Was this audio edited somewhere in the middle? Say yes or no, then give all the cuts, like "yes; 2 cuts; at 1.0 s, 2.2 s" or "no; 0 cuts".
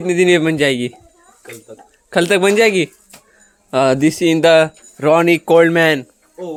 no; 0 cuts